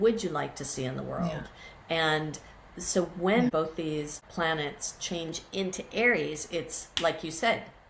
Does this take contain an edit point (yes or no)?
no